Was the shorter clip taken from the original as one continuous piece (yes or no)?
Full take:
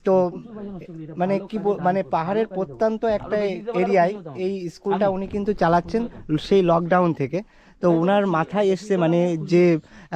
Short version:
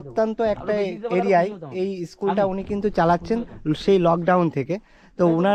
yes